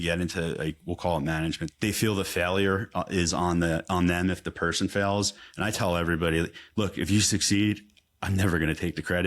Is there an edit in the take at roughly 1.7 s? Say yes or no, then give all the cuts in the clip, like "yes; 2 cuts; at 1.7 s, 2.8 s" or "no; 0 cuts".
yes; 1 cut; at 1.7 s